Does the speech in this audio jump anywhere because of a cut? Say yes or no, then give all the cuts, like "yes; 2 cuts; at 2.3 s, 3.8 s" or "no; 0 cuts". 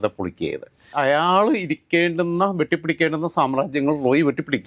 yes; 1 cut; at 0.9 s